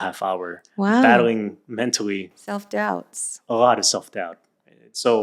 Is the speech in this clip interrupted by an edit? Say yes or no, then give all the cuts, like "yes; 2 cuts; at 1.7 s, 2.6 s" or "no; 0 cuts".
no; 0 cuts